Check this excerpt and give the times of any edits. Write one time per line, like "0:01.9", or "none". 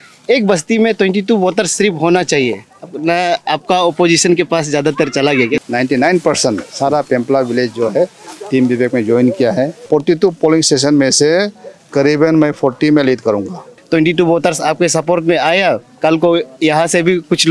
0:05.6
0:09.8
0:13.7